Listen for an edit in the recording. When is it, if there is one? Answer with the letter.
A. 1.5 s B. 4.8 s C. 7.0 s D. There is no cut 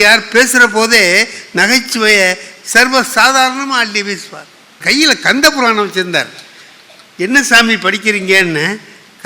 B